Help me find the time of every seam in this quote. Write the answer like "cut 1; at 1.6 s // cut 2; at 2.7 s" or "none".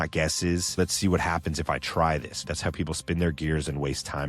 cut 1; at 0.8 s // cut 2; at 2.5 s

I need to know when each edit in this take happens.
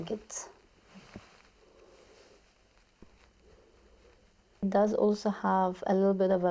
cut 1; at 3.0 s // cut 2; at 4.6 s

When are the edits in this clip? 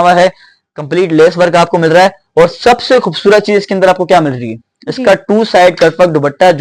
none

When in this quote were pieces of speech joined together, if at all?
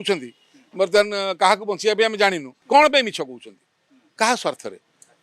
cut 1; at 2.5 s

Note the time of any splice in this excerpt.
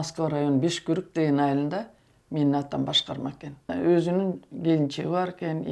cut 1; at 3.6 s

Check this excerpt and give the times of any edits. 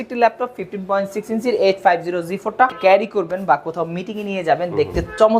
cut 1; at 2.8 s

